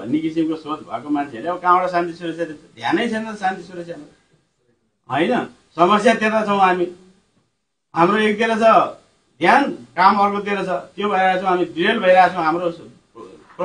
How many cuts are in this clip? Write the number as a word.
zero